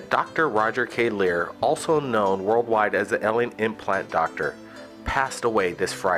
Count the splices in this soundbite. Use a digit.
0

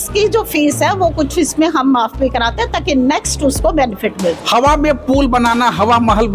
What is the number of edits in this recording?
1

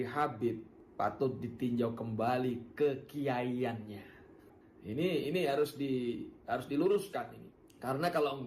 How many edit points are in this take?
1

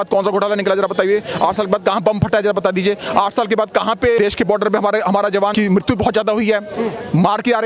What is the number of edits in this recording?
2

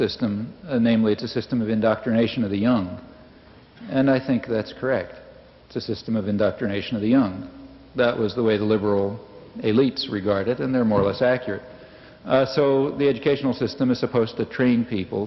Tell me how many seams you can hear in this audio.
0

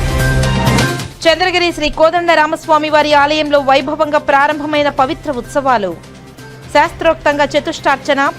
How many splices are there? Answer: 1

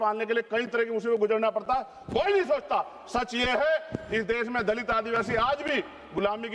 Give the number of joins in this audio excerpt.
0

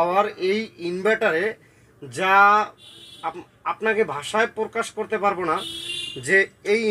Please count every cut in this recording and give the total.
0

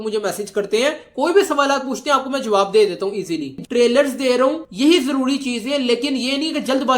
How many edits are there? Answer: 1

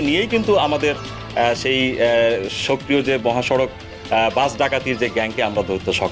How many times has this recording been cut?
0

